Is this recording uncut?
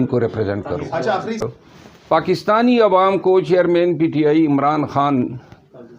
no; 1 cut; at 1.4 s

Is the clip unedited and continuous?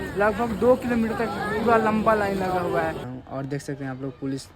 no; 1 cut; at 3.1 s

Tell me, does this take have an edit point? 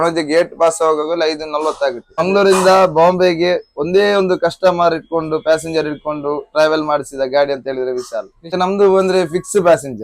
yes; 2 cuts; at 2.2 s, 8.4 s

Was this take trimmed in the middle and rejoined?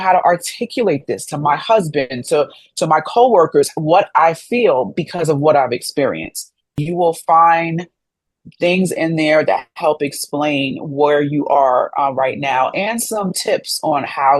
yes; 1 cut; at 6.7 s

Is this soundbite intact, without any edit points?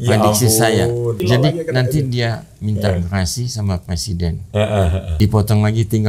no; 2 cuts; at 1.2 s, 5.1 s

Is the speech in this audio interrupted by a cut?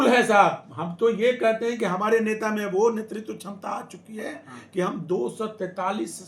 no; 0 cuts

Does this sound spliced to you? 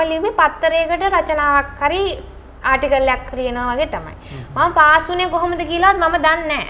no; 0 cuts

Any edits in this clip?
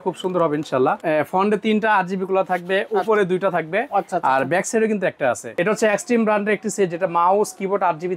yes; 2 cuts; at 1.0 s, 5.4 s

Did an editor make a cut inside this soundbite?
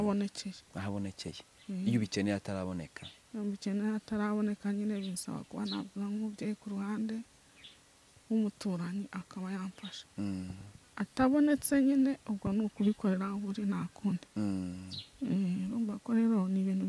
no; 0 cuts

